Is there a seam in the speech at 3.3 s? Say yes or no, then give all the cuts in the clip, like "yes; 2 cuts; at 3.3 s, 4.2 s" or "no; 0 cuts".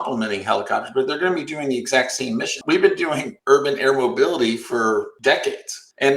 yes; 3 cuts; at 2.6 s, 3.3 s, 5.4 s